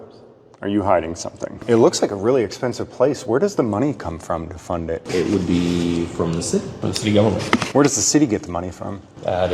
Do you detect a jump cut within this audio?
yes; 3 cuts; at 1.6 s, 5.0 s, 6.8 s

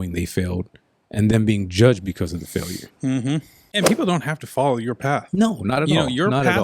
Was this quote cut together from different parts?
yes; 1 cut; at 3.6 s

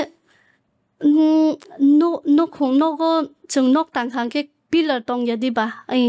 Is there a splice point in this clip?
no; 0 cuts

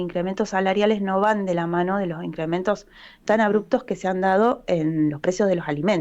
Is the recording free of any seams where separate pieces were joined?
yes; 0 cuts

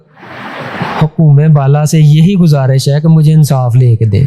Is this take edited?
no; 0 cuts

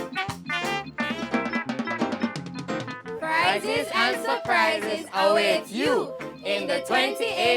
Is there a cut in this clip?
yes; 1 cut; at 3.1 s

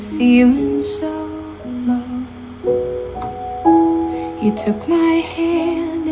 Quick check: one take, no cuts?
yes; 0 cuts

